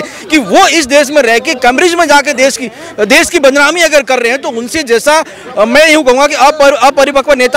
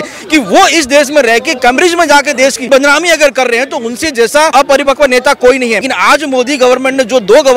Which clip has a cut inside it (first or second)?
second